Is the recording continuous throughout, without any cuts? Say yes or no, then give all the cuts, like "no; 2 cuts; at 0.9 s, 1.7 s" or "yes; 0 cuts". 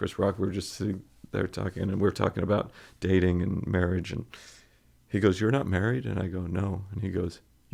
yes; 0 cuts